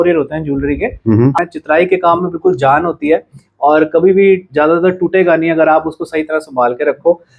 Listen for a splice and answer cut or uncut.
cut